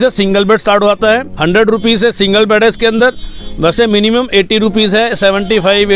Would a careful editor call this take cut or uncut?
cut